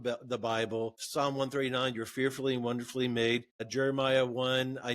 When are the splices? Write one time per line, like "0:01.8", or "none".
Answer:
0:01.0
0:03.7